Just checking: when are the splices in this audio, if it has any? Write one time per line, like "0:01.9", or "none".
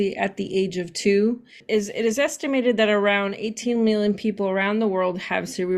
0:01.6